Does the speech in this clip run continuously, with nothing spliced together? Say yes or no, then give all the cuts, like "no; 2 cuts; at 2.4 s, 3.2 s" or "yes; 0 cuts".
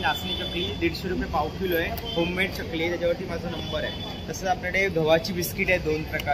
yes; 0 cuts